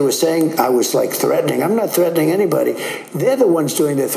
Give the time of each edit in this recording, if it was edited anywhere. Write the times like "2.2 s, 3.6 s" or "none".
none